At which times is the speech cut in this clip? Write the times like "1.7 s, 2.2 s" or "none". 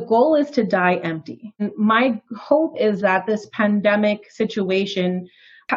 1.6 s